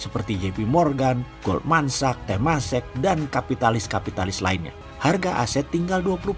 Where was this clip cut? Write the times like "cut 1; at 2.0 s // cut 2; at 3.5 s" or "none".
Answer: cut 1; at 4.8 s